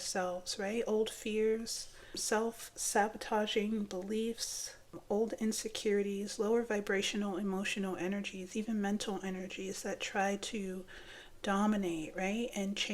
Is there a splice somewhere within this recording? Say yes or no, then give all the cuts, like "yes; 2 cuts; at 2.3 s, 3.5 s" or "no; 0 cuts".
yes; 2 cuts; at 2.1 s, 4.9 s